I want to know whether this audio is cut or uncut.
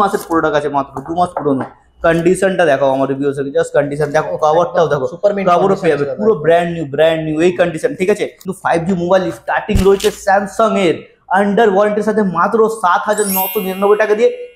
cut